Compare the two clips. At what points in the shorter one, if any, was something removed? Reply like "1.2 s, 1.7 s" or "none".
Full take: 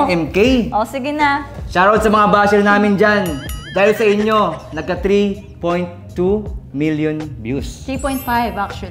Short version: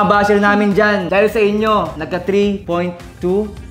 1.1 s, 2.3 s